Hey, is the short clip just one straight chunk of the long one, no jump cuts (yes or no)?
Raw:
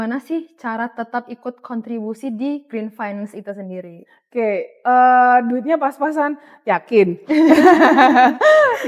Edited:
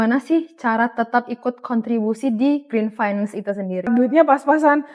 no